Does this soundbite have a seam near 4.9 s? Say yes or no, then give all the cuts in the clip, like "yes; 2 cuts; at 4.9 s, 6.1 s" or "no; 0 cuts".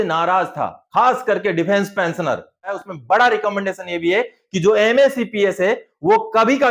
no; 1 cut; at 2.7 s